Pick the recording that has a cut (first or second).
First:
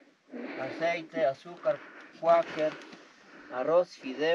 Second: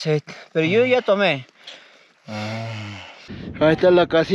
second